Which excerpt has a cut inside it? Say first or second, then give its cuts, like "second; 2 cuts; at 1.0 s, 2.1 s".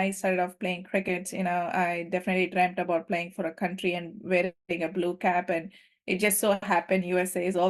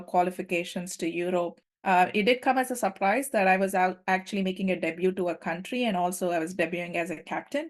second; 1 cut; at 1.7 s